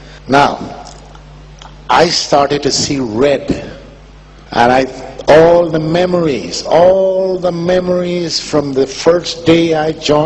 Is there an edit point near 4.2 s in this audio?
no; 1 cut; at 6.9 s

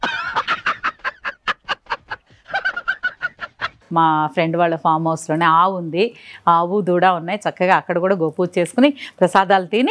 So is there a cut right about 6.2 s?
no; 1 cut; at 3.7 s

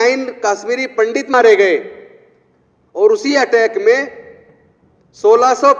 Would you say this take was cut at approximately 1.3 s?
yes; 1 cut; at 1.3 s

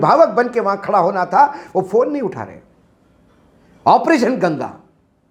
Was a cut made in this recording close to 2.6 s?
no; 0 cuts

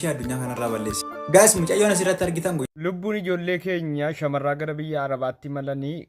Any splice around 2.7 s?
yes; 1 cut; at 2.7 s

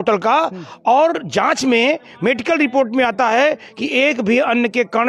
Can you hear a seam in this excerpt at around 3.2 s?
no; 0 cuts

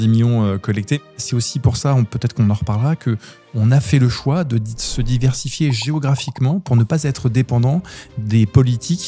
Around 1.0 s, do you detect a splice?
yes; 1 cut; at 1.0 s

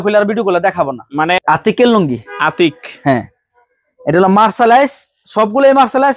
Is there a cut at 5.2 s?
no; 1 cut; at 1.4 s

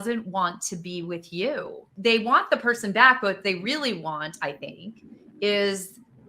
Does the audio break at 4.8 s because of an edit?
no; 1 cut; at 1.9 s

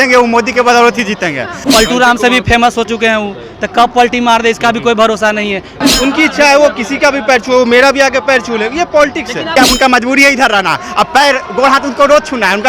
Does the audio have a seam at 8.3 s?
no; 3 cuts; at 1.6 s, 5.8 s, 9.5 s

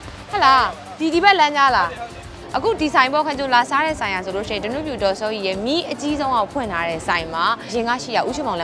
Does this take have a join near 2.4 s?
yes; 2 cuts; at 2.4 s, 7.7 s

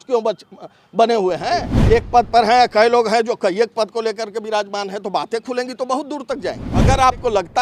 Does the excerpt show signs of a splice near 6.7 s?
yes; 2 cuts; at 1.7 s, 6.7 s

